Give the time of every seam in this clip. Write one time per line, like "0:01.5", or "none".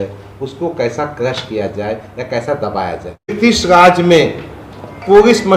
0:03.3